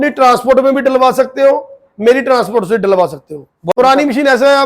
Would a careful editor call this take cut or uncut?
cut